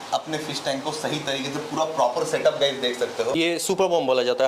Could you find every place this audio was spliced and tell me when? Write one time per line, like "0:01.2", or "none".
0:03.4